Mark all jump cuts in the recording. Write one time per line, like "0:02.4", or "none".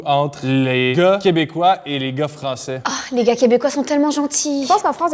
0:00.9
0:02.8